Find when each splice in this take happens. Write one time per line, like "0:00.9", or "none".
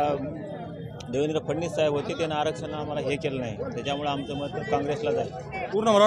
none